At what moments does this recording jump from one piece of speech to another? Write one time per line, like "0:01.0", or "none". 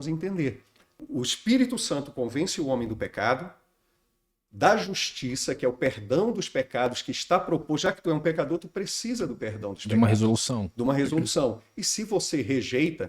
0:01.0